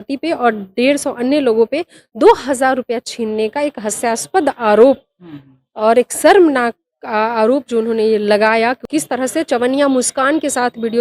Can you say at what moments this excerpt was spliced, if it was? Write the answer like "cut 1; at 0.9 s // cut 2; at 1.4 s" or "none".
cut 1; at 8.8 s